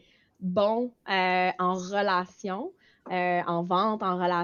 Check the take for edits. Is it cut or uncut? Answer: uncut